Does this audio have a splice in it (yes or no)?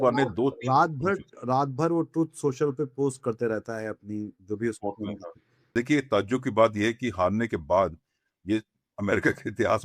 yes